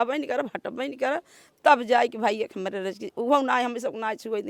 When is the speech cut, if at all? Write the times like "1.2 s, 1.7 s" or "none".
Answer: none